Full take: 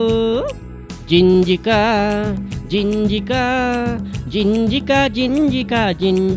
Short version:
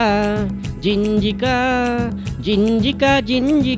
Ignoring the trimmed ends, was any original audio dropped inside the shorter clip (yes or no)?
no